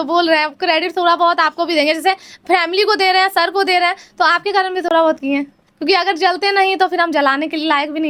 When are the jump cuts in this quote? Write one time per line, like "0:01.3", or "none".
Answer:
none